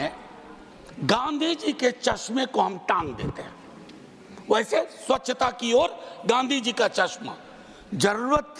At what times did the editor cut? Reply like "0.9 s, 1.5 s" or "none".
none